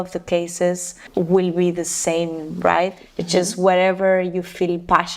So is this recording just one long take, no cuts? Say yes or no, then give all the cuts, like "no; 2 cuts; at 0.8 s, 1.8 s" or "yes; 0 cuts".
no; 2 cuts; at 1.0 s, 3.0 s